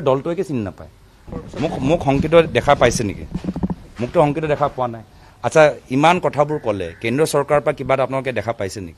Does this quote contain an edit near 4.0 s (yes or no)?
no